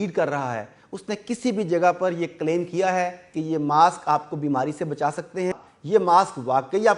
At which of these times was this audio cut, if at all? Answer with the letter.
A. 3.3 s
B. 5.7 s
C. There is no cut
B